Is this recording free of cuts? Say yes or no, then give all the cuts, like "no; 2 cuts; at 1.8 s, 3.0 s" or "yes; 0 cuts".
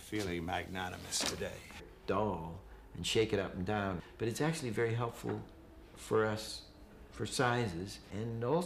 yes; 0 cuts